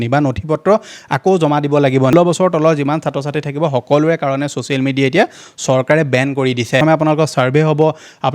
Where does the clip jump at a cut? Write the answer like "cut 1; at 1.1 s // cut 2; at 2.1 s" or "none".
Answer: cut 1; at 2.1 s // cut 2; at 6.8 s